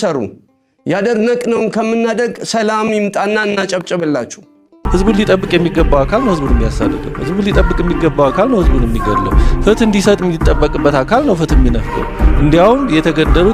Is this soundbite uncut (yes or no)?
no